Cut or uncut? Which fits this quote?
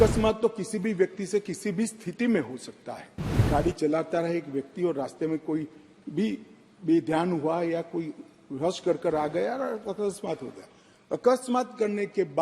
cut